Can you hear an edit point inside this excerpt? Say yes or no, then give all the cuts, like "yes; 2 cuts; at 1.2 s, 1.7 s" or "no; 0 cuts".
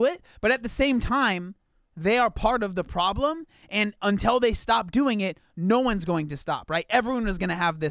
no; 0 cuts